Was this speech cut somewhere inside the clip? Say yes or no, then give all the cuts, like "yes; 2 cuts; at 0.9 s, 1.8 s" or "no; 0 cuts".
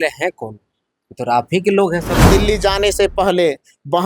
yes; 1 cut; at 2.2 s